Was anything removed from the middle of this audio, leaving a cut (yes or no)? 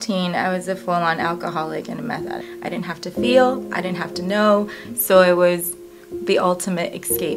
yes